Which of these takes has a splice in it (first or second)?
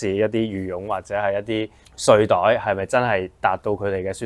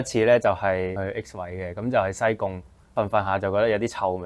second